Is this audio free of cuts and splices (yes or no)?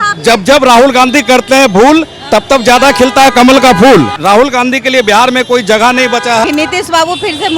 no